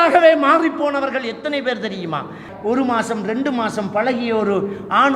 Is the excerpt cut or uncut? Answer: cut